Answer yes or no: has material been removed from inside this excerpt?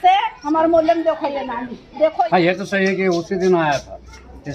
yes